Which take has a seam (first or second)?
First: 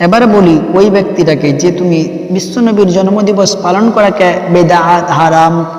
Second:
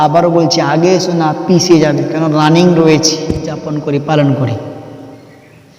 second